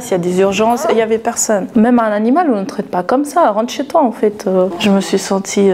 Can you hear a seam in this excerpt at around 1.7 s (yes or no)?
yes